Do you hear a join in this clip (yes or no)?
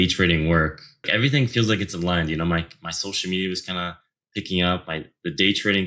yes